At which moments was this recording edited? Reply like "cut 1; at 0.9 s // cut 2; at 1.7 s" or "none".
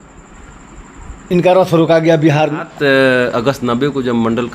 cut 1; at 2.7 s